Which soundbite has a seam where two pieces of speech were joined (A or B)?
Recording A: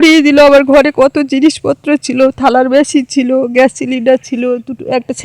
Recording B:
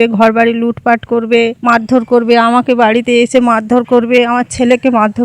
B